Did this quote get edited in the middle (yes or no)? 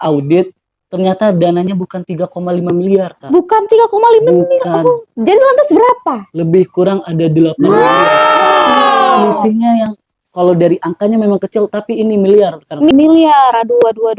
yes